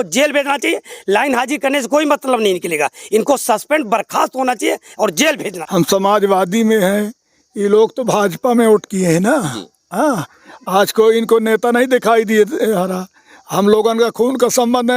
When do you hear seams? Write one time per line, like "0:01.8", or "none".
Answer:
0:05.5